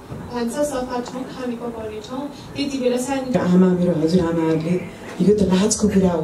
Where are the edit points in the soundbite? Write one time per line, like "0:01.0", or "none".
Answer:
0:03.3